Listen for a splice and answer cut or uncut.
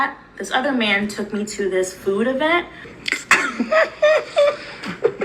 cut